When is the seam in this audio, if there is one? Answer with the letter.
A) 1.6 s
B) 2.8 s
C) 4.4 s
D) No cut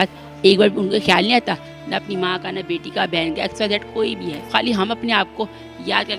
C